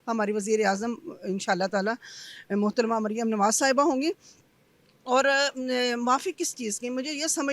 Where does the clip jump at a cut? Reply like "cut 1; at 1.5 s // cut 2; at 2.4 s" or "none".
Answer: none